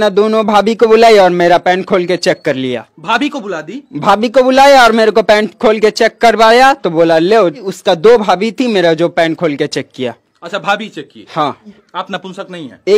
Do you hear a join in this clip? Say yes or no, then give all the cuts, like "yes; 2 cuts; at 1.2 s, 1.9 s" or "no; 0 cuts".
yes; 2 cuts; at 7.7 s, 11.8 s